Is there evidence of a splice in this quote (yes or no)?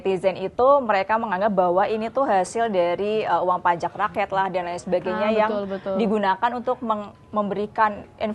no